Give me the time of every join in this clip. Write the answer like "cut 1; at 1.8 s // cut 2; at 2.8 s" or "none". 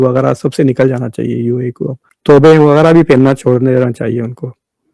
cut 1; at 2.1 s